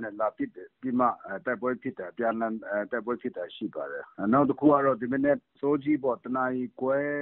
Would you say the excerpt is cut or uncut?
cut